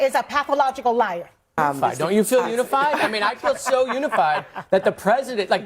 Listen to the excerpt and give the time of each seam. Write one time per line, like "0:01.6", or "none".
0:01.6